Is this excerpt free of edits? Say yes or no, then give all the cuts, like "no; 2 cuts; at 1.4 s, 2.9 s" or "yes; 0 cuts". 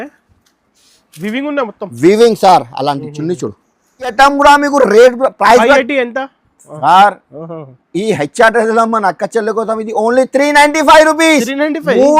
no; 1 cut; at 4.1 s